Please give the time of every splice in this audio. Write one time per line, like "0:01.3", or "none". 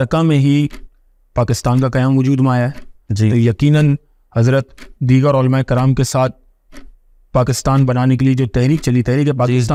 none